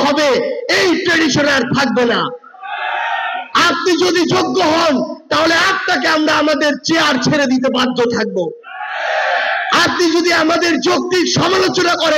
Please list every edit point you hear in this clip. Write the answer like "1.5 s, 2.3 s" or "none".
none

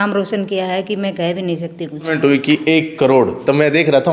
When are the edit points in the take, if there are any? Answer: 2.0 s

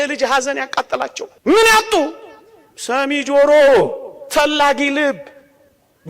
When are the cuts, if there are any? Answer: 1.3 s

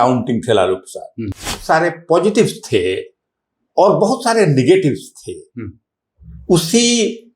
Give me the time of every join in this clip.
1.5 s

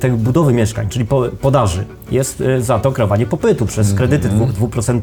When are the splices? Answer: none

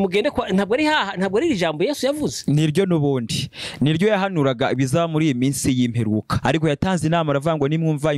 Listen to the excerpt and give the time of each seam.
none

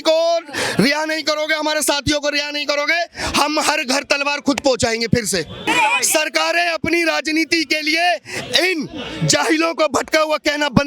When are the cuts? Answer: 5.7 s

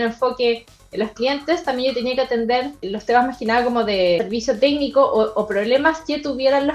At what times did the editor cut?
2.9 s, 4.2 s

